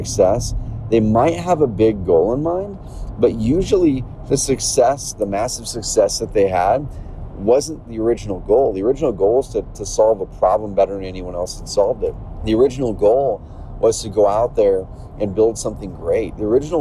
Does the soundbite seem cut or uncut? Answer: cut